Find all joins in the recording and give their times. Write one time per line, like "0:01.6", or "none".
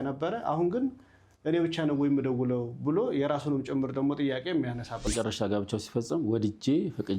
0:05.1

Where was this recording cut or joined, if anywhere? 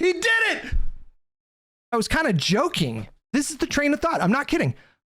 0:01.7
0:03.2

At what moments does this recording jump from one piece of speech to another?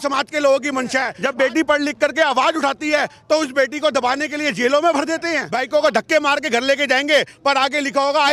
0:01.1
0:05.5

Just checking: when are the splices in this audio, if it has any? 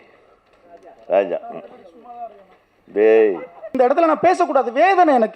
0:03.6

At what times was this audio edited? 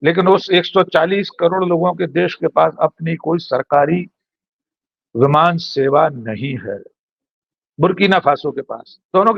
none

